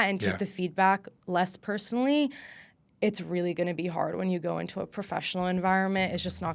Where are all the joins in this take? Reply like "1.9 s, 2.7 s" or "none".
none